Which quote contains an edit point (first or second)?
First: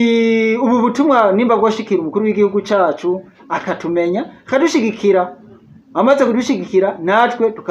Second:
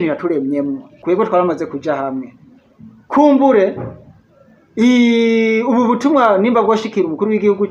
second